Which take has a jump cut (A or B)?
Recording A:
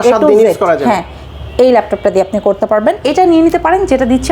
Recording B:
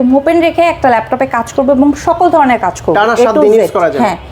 A